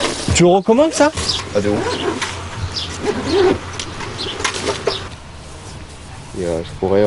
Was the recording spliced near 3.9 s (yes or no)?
no